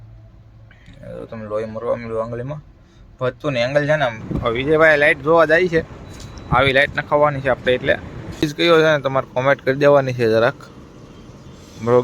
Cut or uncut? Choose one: cut